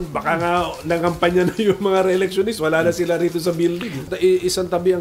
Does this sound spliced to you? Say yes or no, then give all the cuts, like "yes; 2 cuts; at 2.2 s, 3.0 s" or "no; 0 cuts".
yes; 1 cut; at 4.1 s